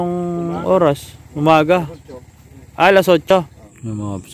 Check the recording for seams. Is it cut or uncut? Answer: cut